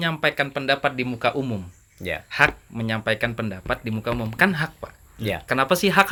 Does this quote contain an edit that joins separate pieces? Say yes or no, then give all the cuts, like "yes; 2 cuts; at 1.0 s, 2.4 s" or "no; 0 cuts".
no; 0 cuts